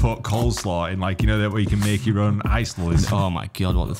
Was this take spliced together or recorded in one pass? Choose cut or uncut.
cut